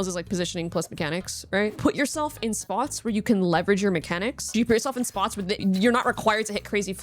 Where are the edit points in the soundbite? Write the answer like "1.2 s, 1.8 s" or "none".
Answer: 1.8 s, 4.4 s, 5.5 s